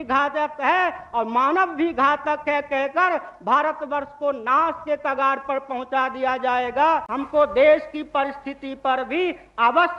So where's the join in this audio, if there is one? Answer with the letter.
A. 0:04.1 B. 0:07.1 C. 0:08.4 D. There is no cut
B